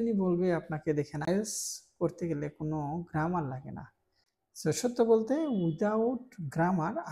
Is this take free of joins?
no; 1 cut; at 1.3 s

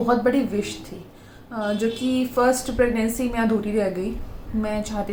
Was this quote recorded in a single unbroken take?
yes; 0 cuts

